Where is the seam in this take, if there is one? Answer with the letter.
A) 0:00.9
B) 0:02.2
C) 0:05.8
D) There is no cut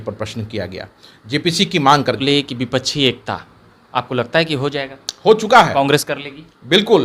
B